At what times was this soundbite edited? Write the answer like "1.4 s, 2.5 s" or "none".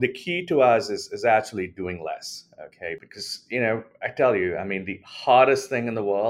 3.0 s